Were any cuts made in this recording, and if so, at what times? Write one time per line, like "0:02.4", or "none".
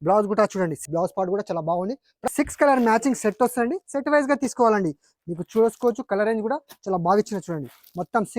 0:00.8
0:02.3